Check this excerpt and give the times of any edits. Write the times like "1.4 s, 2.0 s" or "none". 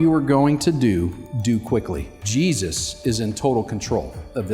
2.2 s